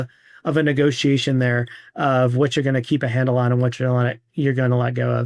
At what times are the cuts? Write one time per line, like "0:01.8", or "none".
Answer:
none